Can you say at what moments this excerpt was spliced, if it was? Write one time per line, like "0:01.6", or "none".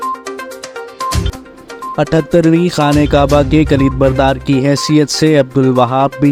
none